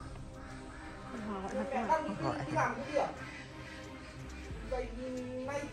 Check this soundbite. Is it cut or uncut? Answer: uncut